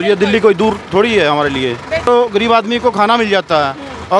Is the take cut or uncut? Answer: cut